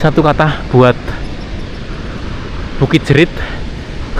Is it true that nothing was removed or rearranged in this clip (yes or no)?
yes